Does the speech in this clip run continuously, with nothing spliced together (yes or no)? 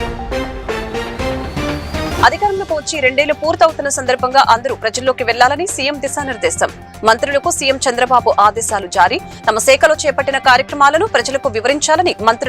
yes